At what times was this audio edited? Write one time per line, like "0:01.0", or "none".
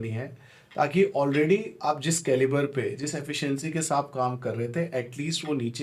none